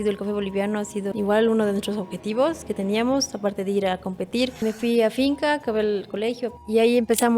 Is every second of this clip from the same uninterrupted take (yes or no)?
no